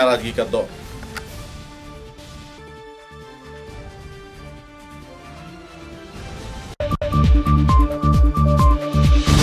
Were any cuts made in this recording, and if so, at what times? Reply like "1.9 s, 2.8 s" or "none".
6.9 s